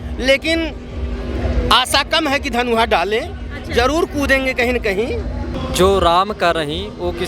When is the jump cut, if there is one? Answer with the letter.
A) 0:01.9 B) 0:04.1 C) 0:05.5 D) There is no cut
C